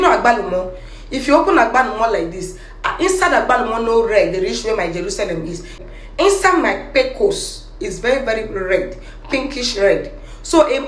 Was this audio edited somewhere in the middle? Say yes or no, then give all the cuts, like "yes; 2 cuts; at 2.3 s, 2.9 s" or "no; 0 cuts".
yes; 1 cut; at 5.8 s